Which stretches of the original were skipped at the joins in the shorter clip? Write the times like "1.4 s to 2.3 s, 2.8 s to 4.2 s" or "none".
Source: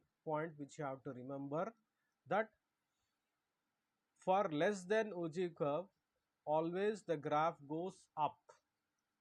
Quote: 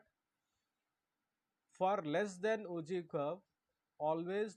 none